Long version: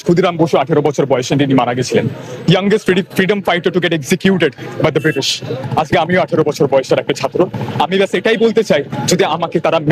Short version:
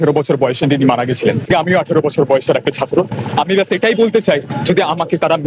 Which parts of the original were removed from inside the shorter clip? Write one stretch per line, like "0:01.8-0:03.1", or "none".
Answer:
0:02.1-0:05.9